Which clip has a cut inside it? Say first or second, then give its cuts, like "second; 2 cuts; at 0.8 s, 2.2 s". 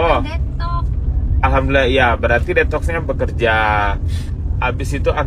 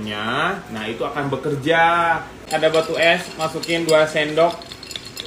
second; 1 cut; at 2.3 s